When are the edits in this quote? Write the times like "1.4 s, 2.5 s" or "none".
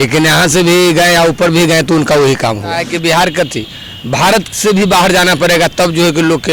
2.9 s